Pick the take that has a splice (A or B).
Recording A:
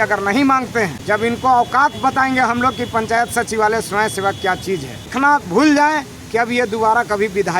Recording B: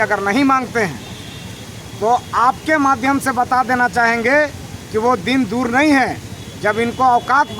A